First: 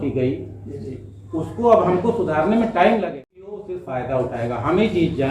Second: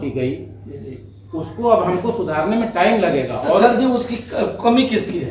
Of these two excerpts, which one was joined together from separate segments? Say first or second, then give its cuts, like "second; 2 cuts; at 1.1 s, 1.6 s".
first; 1 cut; at 3.4 s